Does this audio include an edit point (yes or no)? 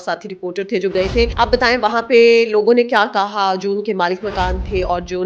yes